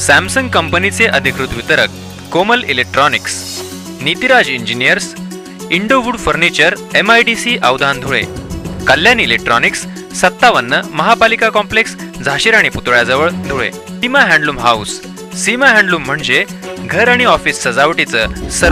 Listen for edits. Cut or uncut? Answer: cut